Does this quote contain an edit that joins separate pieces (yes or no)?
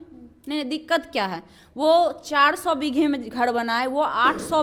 no